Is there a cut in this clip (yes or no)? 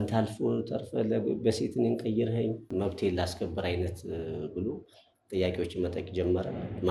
yes